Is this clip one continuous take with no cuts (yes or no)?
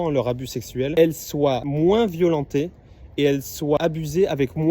no